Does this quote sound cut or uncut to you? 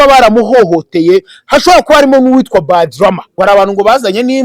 cut